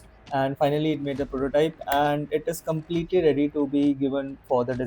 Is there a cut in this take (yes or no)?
no